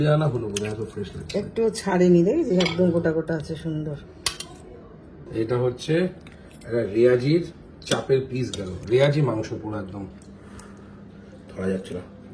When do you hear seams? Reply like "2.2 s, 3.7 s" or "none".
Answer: 4.1 s, 5.3 s, 10.1 s